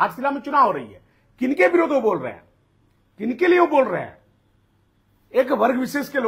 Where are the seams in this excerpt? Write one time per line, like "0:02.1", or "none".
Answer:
none